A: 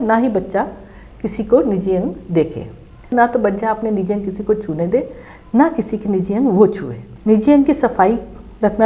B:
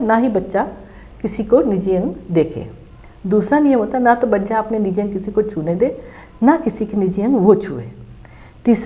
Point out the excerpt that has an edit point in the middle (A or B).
A